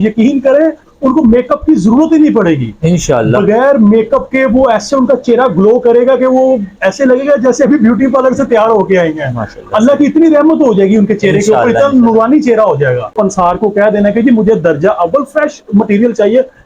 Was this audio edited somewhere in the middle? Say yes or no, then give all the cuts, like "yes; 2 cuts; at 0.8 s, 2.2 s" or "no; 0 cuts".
yes; 1 cut; at 13.1 s